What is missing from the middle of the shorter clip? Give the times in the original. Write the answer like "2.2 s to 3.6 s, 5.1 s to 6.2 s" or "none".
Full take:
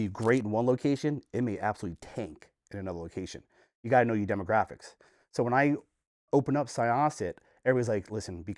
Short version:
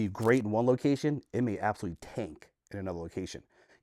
none